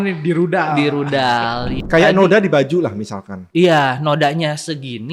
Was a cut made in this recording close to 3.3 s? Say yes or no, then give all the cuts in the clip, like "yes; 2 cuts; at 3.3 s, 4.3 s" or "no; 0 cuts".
no; 1 cut; at 1.8 s